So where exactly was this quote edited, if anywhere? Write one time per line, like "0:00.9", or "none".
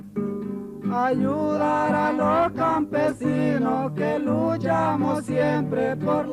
0:01.2